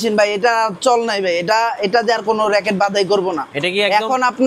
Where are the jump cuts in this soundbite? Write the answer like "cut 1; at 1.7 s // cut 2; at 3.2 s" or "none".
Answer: none